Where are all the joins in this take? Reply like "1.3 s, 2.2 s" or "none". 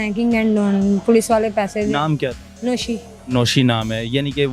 2.5 s